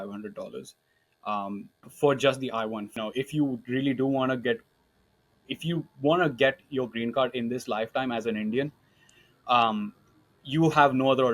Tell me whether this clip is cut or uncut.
cut